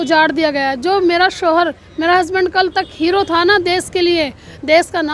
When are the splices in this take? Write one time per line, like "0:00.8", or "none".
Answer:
none